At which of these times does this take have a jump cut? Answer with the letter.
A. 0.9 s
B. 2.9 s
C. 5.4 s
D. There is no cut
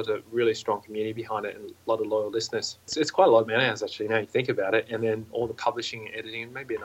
B